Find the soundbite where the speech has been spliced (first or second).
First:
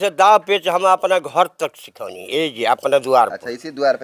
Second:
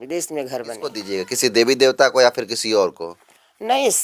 second